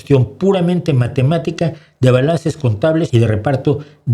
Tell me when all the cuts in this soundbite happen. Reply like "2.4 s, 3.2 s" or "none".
3.1 s